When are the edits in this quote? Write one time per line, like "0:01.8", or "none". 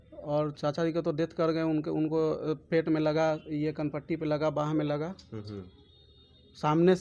none